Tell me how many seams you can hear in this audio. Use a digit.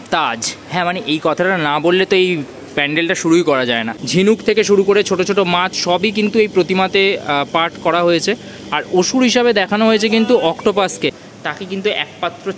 2